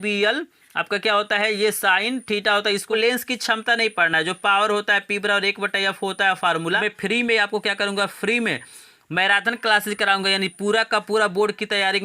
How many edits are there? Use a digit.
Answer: 2